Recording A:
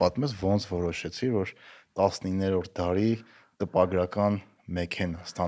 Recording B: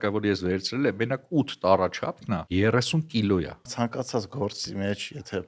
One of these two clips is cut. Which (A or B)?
B